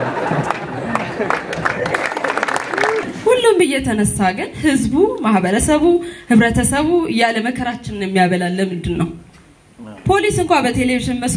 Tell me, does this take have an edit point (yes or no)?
yes